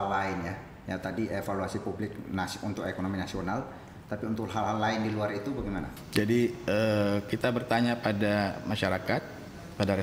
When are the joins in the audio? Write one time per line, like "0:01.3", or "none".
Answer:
0:05.9